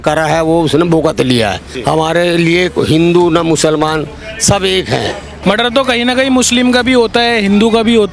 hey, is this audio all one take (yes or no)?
no